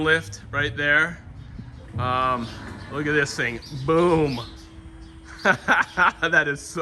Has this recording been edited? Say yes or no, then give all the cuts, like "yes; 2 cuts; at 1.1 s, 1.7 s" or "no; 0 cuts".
no; 0 cuts